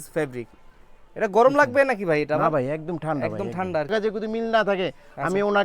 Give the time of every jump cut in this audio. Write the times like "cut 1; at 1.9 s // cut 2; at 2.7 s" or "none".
cut 1; at 3.9 s